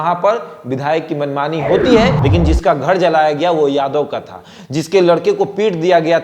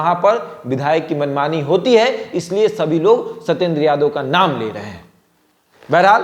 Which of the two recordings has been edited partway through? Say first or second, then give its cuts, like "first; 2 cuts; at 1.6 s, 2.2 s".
first; 1 cut; at 2.2 s